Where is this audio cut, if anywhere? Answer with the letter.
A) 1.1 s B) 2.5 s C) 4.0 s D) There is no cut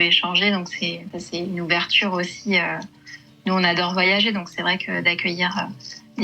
A